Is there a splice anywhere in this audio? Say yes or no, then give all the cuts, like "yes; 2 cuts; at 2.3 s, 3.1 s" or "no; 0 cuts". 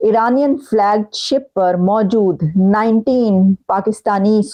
no; 0 cuts